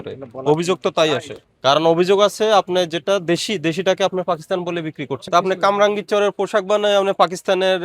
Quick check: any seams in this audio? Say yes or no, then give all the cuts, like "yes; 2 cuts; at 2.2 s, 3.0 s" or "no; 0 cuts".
yes; 2 cuts; at 1.3 s, 5.2 s